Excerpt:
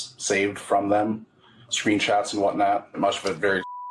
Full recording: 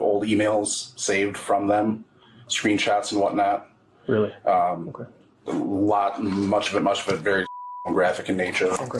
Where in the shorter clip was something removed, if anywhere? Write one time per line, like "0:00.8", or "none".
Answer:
0:03.0